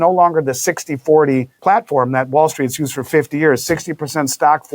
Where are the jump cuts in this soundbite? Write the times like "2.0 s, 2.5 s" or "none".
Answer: 1.5 s